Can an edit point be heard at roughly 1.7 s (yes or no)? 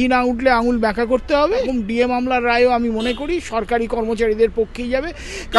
yes